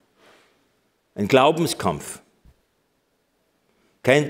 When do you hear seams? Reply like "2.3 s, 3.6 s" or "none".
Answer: none